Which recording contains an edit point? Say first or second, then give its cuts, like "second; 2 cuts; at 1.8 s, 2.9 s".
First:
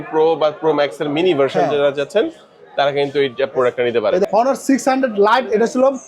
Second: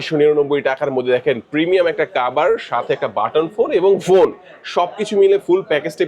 first; 1 cut; at 4.2 s